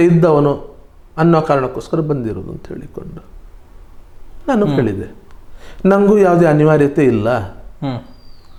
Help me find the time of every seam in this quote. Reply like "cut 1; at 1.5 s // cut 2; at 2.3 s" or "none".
none